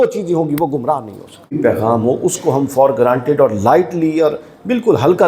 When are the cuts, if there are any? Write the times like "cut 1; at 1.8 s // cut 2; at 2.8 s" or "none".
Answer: cut 1; at 1.6 s